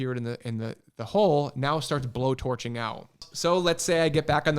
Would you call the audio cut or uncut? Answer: cut